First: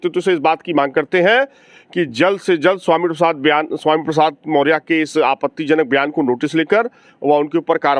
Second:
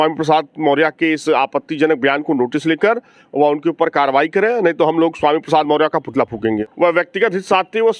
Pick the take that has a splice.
second; 1 cut; at 6.7 s

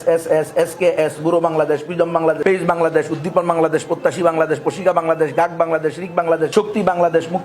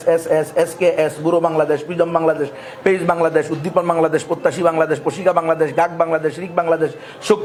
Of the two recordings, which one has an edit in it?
first; 2 cuts; at 2.4 s, 6.5 s

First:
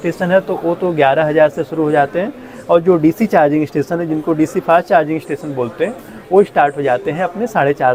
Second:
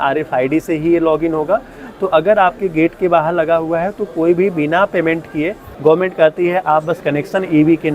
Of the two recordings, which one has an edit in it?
second; 1 cut; at 5.7 s

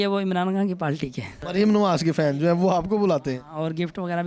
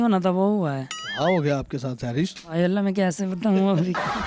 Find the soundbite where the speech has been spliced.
first; 1 cut; at 1.4 s

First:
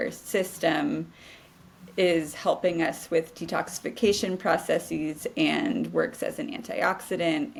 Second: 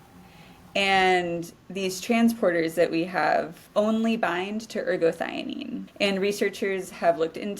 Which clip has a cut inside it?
second; 2 cuts; at 3.6 s, 5.8 s

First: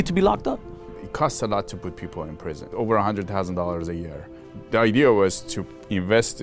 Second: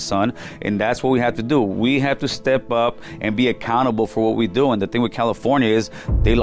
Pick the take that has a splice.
first; 3 cuts; at 1.0 s, 2.6 s, 4.5 s

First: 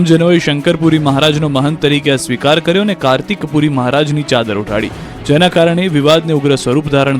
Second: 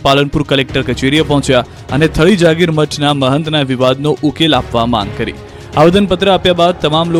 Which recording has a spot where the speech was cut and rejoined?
first; 1 cut; at 6.0 s

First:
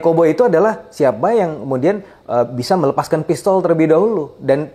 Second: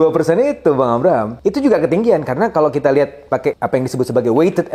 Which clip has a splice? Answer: second; 2 cuts; at 1.3 s, 3.6 s

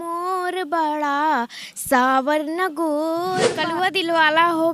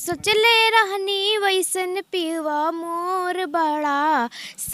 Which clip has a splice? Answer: first; 1 cut; at 3.6 s

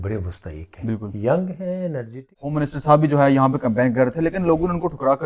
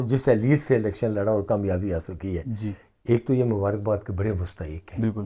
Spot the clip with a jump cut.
first; 1 cut; at 2.5 s

